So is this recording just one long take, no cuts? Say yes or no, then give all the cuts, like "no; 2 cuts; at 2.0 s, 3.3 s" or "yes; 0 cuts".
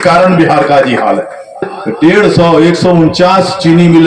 no; 1 cut; at 1.8 s